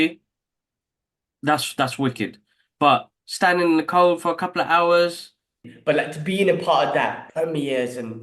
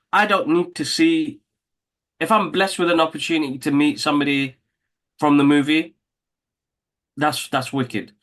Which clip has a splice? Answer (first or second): first